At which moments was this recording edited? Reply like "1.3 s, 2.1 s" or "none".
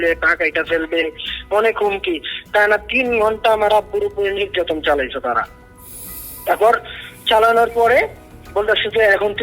none